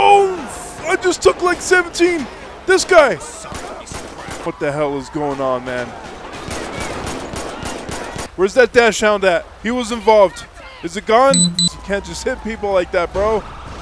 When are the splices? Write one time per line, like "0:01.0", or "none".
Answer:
0:04.3
0:08.2
0:11.7